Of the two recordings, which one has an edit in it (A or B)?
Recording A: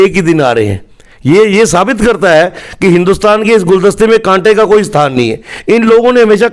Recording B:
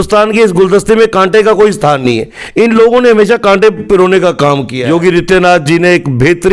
B